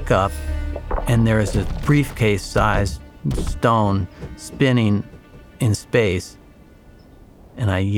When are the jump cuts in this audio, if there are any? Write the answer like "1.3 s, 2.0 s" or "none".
none